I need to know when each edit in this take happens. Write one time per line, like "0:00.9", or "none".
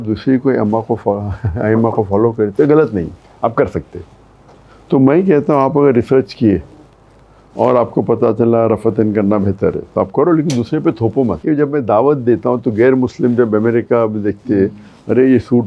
0:11.4